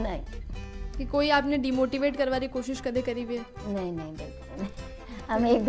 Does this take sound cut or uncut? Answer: uncut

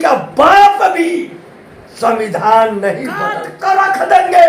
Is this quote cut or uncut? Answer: cut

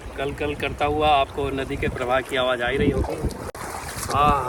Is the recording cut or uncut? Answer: uncut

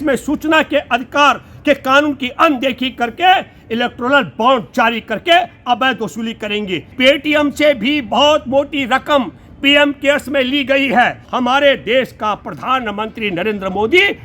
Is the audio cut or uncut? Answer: cut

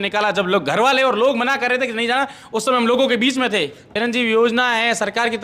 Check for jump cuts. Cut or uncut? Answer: cut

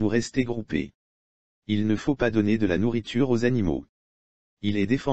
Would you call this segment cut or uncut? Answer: uncut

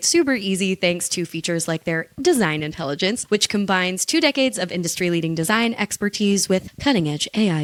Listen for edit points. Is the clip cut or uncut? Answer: uncut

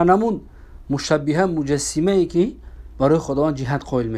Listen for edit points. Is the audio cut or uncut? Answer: uncut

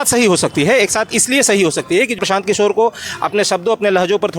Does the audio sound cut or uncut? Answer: cut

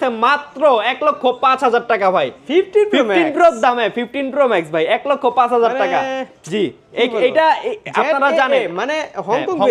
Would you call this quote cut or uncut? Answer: uncut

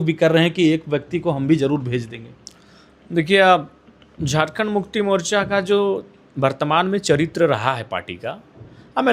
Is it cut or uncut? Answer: uncut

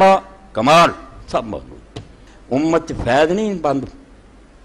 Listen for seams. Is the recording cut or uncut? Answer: uncut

